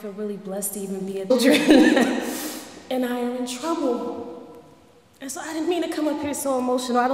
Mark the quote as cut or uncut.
uncut